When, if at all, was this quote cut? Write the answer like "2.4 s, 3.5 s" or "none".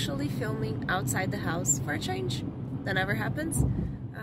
none